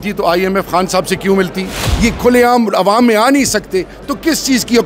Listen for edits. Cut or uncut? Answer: cut